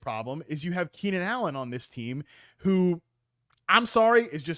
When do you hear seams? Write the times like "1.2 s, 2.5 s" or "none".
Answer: none